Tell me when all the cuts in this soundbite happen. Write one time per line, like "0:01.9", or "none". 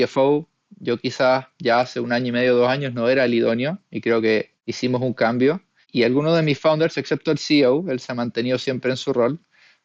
0:04.6
0:05.9